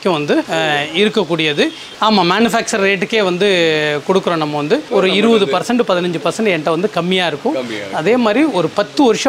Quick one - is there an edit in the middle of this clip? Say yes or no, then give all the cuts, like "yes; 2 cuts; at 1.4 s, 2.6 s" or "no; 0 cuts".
yes; 2 cuts; at 1.8 s, 4.9 s